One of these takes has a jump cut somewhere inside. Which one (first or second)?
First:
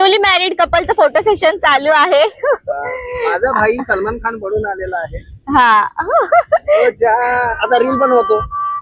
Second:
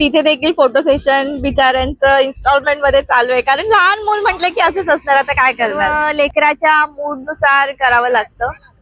second